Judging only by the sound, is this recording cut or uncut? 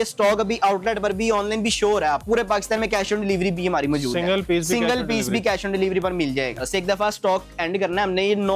cut